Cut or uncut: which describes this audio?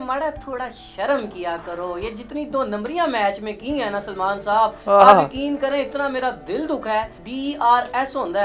cut